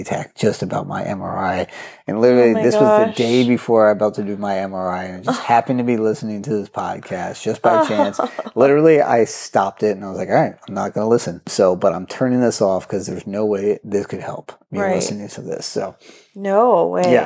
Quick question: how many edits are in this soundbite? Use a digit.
1